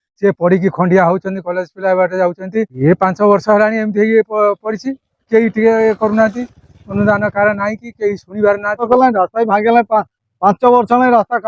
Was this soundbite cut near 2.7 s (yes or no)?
yes